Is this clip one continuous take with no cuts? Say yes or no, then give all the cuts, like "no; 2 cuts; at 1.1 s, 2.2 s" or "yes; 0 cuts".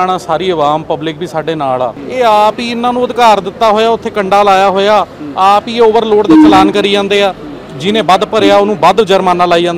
no; 1 cut; at 2.0 s